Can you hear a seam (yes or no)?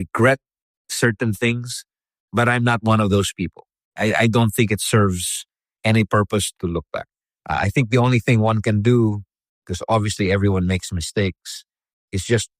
no